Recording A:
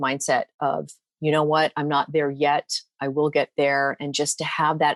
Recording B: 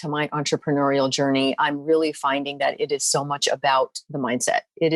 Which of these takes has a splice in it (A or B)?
B